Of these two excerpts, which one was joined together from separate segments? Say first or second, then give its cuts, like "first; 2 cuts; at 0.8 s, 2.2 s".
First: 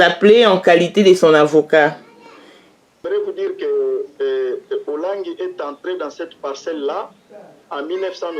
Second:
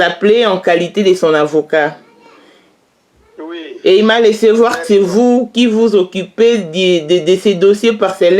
first; 1 cut; at 3.0 s